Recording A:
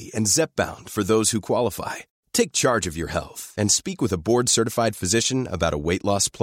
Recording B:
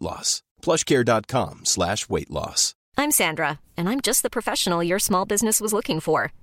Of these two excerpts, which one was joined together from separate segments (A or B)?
B